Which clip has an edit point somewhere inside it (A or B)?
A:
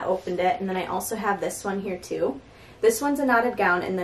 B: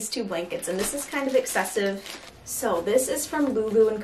B